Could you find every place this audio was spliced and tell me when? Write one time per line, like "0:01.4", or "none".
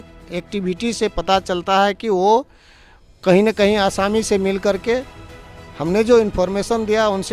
none

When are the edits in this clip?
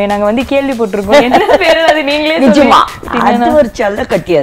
0:03.0

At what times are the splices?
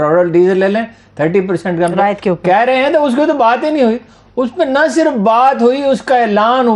none

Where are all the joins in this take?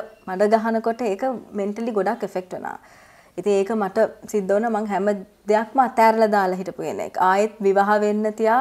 none

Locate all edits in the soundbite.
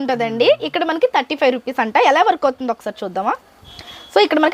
none

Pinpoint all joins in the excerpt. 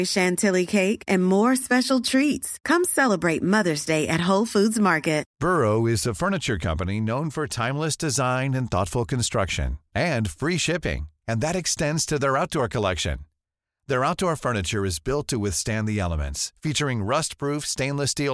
0:05.3

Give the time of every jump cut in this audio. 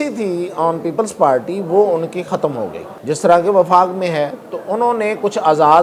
0:02.9

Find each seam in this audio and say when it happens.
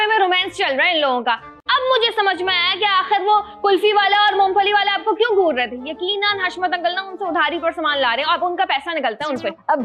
none

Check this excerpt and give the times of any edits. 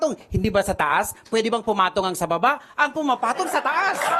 none

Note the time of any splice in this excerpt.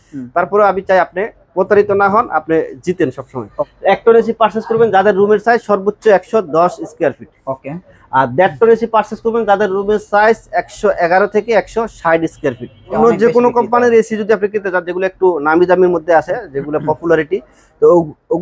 0:03.7
0:13.0

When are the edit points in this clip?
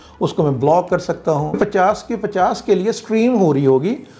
0:01.5

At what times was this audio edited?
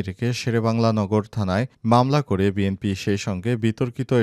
none

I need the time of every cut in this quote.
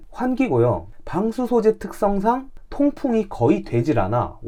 none

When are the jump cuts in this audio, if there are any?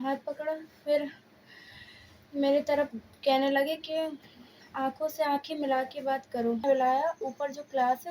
0:06.6

